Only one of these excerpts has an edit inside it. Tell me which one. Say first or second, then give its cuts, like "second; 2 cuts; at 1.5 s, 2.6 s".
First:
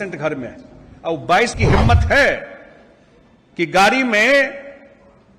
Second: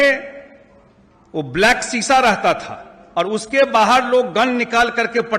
first; 1 cut; at 1.6 s